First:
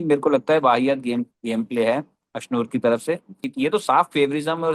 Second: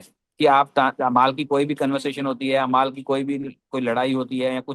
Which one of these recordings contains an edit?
first; 1 cut; at 3.5 s

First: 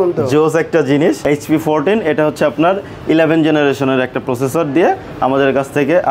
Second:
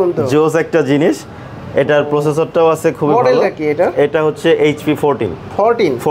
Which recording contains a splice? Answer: first; 1 cut; at 1.2 s

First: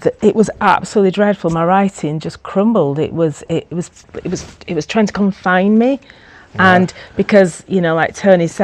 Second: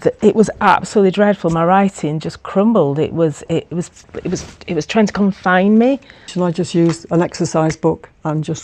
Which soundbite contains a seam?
second; 1 cut; at 6.3 s

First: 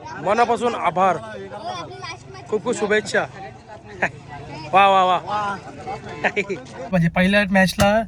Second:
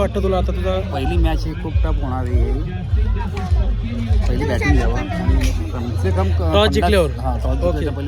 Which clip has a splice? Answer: first; 1 cut; at 6.9 s

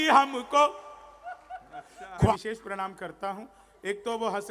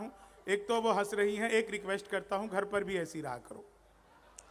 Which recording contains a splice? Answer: first; 1 cut; at 2.3 s

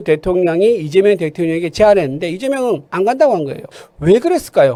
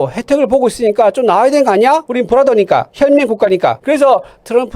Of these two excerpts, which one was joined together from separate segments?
second; 2 cuts; at 2.1 s, 3.8 s

